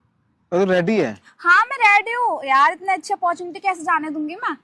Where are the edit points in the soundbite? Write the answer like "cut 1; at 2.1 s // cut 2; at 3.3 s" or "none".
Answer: none